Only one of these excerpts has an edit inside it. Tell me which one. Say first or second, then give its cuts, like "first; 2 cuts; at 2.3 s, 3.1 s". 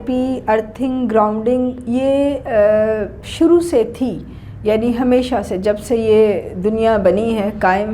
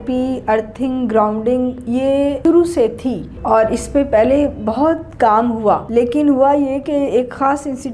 second; 3 cuts; at 2.4 s, 3.3 s, 5.8 s